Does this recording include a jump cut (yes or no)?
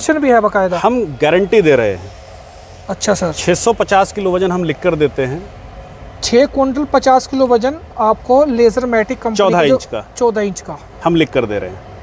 no